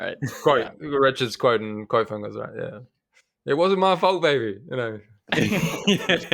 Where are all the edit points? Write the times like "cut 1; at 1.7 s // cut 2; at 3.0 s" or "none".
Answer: none